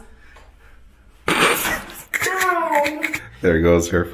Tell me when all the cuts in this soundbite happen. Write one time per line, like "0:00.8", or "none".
0:03.2